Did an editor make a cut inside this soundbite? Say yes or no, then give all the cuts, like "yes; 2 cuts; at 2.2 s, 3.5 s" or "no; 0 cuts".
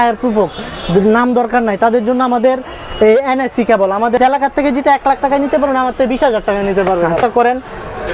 yes; 2 cuts; at 4.2 s, 7.2 s